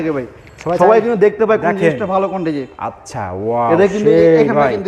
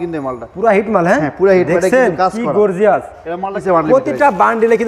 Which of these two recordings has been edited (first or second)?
second